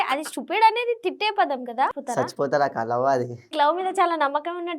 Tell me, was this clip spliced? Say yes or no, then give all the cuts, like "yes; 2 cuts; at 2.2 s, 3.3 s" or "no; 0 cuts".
yes; 2 cuts; at 1.9 s, 3.5 s